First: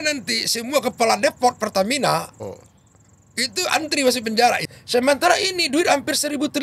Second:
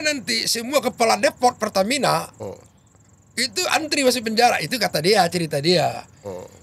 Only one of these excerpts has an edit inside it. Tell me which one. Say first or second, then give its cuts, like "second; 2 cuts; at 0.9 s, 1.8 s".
first; 1 cut; at 4.7 s